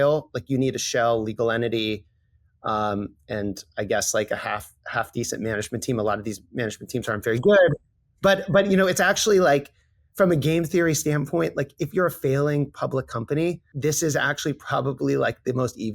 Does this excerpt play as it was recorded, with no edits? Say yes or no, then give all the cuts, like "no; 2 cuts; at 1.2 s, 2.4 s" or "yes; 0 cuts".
no; 1 cut; at 13.7 s